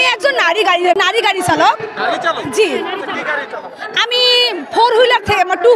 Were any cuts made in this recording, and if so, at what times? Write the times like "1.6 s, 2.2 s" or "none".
1.0 s